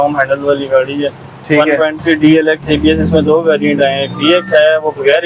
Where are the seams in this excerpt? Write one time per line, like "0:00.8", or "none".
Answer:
none